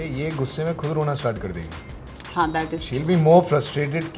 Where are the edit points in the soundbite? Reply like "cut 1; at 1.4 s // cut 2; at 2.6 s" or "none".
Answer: none